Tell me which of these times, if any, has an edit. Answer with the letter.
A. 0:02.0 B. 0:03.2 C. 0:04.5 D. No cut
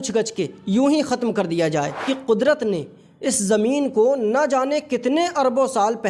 A